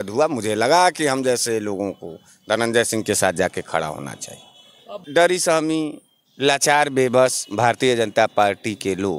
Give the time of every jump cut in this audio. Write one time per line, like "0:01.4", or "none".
0:05.0